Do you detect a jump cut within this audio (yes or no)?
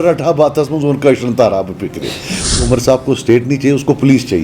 yes